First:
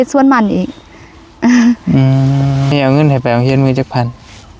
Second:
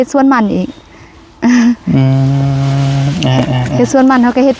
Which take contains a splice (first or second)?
first